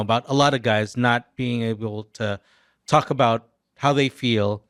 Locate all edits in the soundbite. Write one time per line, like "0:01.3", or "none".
none